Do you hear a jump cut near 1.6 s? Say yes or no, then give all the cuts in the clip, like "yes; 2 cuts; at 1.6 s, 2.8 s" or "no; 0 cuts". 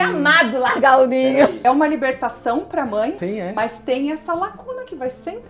yes; 2 cuts; at 1.6 s, 3.2 s